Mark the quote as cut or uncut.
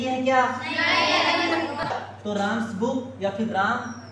cut